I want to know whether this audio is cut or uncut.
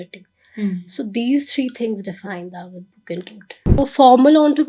cut